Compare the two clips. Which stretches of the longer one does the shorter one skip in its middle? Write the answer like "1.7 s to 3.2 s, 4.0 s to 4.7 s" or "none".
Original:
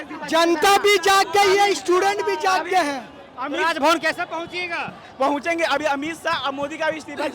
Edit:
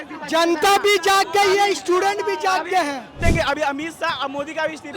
3.2 s to 5.4 s